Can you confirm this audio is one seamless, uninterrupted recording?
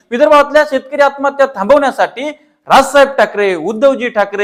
yes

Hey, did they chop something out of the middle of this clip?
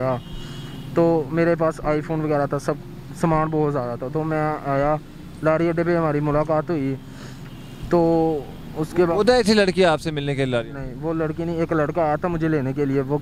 no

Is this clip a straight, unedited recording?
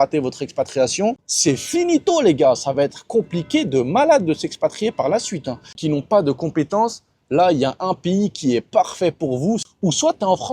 no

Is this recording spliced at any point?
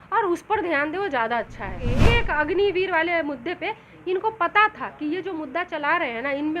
yes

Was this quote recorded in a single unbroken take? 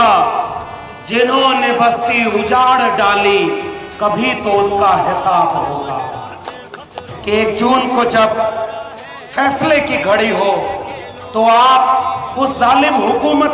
no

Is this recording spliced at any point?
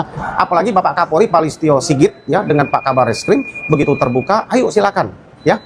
yes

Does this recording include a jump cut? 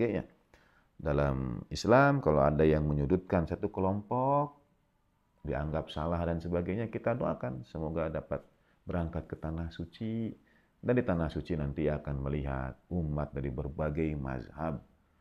no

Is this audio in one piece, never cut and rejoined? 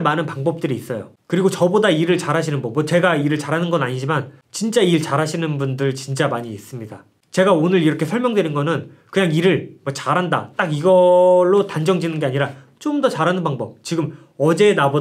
yes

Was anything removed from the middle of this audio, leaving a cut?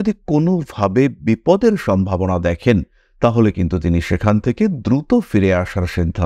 no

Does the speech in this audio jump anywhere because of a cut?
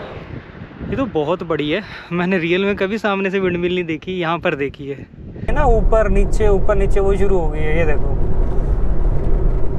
yes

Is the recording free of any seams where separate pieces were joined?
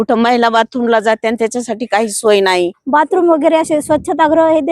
no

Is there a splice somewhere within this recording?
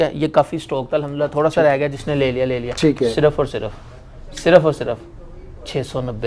no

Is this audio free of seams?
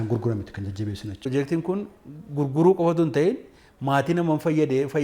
no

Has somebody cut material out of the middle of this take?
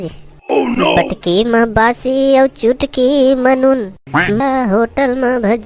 yes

